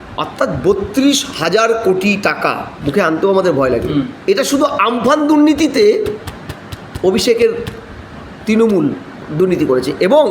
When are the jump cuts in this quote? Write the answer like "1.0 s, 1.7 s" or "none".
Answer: 4.1 s, 9.1 s